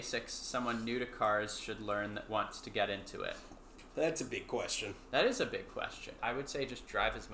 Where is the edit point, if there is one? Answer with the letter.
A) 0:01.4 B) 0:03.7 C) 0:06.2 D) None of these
C